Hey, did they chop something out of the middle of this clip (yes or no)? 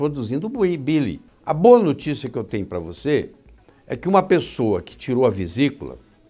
yes